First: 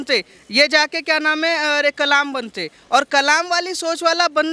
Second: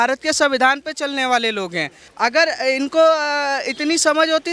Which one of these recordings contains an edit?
second; 1 cut; at 2.0 s

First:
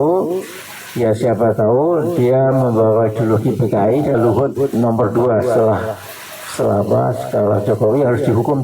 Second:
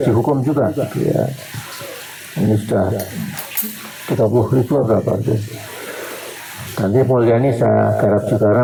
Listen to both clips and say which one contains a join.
first; 1 cut; at 4.2 s

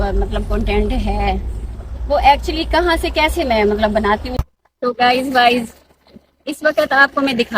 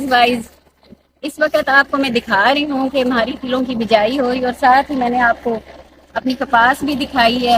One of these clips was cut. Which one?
first; 1 cut; at 4.3 s

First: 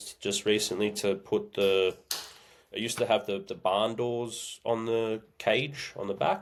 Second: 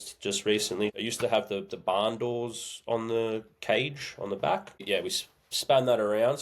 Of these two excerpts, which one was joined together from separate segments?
second; 2 cuts; at 1.0 s, 4.8 s

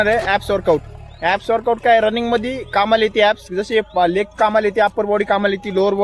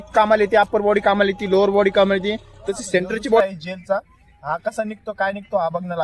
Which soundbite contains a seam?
second; 1 cut; at 3.4 s

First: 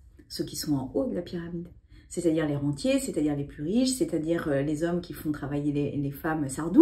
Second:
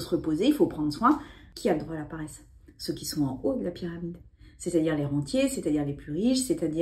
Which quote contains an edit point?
second; 1 cut; at 1.4 s

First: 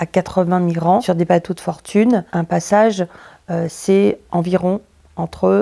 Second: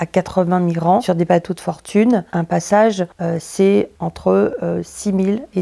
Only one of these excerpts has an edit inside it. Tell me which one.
second; 2 cuts; at 3.1 s, 3.9 s

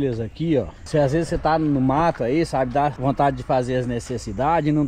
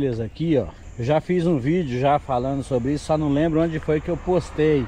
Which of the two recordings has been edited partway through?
first; 2 cuts; at 0.8 s, 3.0 s

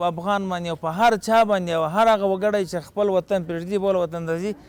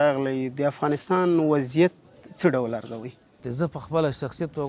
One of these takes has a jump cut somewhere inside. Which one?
second; 1 cut; at 3.4 s

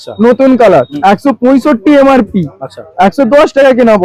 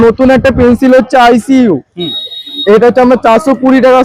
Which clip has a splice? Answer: first; 1 cut; at 0.9 s

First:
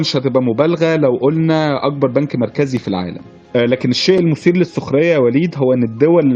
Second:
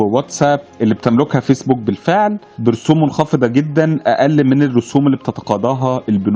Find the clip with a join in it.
first; 1 cut; at 3.4 s

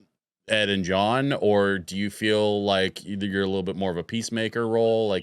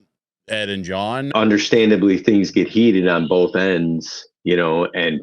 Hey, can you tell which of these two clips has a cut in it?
second; 1 cut; at 1.3 s

